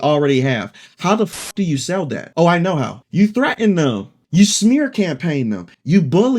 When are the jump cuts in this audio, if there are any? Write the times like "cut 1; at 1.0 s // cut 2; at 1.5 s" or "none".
cut 1; at 2.2 s // cut 2; at 3.0 s